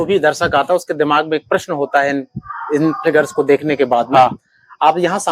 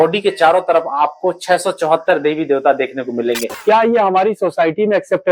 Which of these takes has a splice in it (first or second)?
second